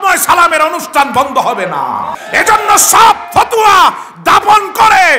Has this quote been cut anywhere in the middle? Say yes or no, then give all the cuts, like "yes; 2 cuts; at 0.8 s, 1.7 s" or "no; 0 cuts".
yes; 1 cut; at 2.1 s